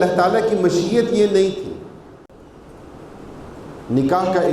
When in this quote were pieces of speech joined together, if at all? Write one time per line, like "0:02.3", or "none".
0:02.3